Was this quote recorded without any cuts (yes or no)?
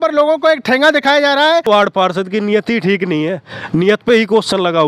no